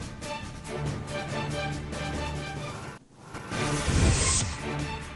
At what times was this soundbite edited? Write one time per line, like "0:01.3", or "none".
0:01.9